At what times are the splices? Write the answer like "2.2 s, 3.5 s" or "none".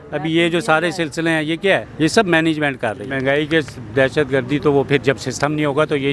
1.9 s, 3.1 s